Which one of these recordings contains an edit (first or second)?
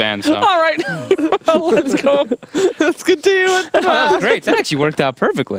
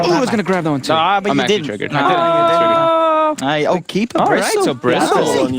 second